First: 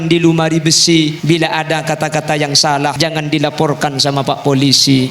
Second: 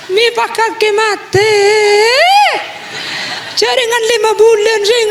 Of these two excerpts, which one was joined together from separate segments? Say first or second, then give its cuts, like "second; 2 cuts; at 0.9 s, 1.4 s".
first; 2 cuts; at 1.2 s, 3.0 s